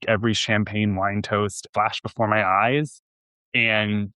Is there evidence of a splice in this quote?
yes; 1 cut; at 1.7 s

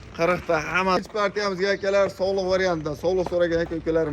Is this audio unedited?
no; 1 cut; at 1.0 s

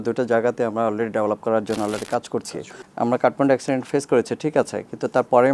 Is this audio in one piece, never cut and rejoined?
no; 1 cut; at 2.5 s

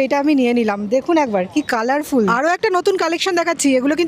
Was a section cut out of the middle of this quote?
yes; 1 cut; at 2.3 s

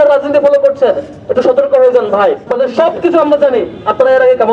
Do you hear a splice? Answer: yes; 1 cut; at 2.5 s

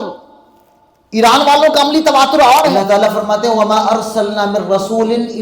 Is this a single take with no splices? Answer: no; 1 cut; at 2.8 s

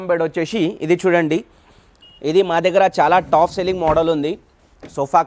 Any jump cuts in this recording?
no; 0 cuts

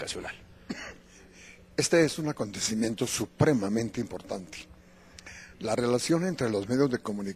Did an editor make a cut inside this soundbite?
no; 0 cuts

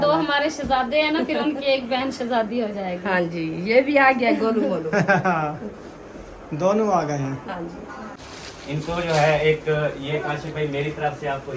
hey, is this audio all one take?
no; 1 cut; at 8.2 s

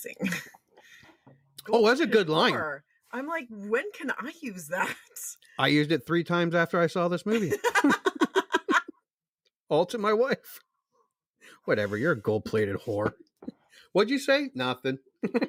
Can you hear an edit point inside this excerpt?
no; 0 cuts

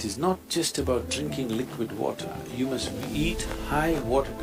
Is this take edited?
no; 0 cuts

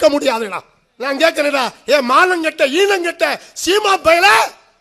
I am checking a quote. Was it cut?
no; 0 cuts

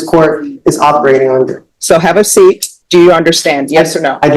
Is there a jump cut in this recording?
yes; 2 cuts; at 1.7 s, 2.7 s

